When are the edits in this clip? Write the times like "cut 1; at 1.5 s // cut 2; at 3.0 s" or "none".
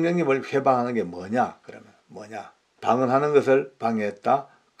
cut 1; at 2.7 s